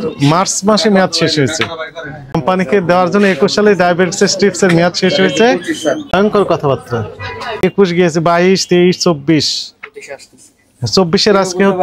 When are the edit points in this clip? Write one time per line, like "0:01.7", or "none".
0:02.3
0:06.0
0:07.6

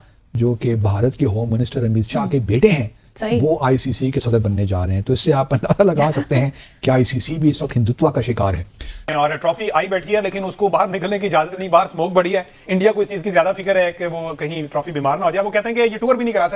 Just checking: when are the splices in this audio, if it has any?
0:09.1

